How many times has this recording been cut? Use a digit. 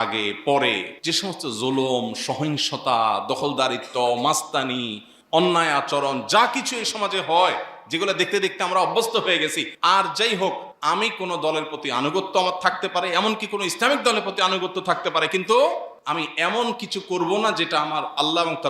4